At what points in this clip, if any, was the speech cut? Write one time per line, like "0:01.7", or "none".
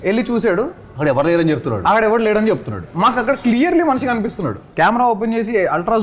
0:04.6

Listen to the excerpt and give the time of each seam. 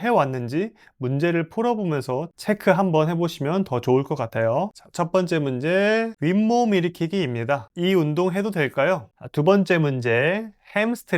0:09.2

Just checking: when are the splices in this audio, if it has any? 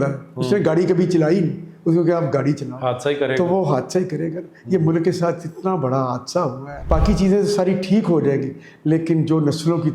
0:06.9

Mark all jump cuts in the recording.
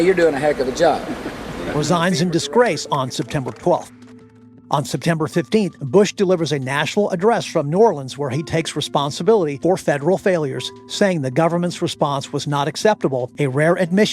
0:05.8
0:09.5
0:13.3

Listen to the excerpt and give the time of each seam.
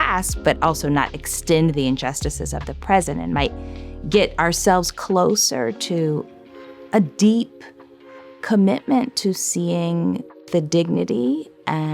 0:10.3

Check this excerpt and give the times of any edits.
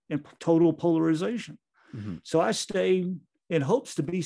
0:03.3

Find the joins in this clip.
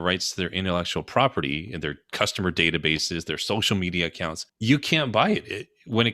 0:04.5

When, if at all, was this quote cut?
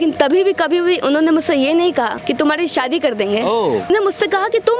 0:02.2
0:03.9

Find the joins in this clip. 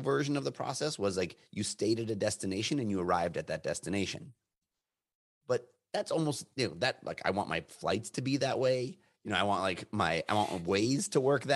none

